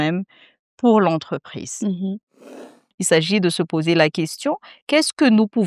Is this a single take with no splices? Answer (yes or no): no